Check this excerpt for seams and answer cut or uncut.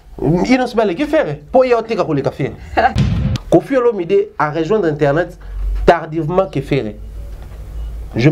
cut